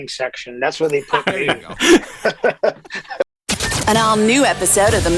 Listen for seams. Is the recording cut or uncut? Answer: cut